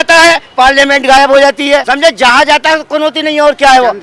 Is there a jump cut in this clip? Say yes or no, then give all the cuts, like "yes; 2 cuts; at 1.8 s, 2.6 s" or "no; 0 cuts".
yes; 1 cut; at 1.9 s